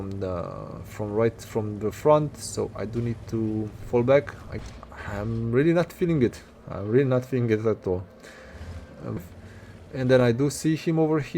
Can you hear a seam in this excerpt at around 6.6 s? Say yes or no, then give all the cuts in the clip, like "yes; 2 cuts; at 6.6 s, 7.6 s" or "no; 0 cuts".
no; 2 cuts; at 4.4 s, 9.2 s